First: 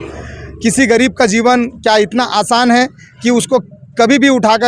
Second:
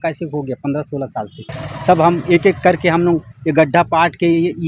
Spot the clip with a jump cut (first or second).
second